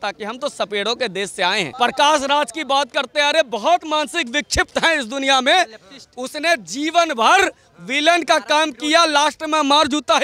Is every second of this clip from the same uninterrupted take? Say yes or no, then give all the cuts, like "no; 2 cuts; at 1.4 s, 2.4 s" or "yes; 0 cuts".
no; 1 cut; at 1.7 s